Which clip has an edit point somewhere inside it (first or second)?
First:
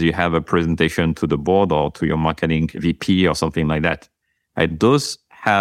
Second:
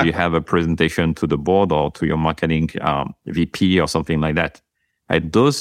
first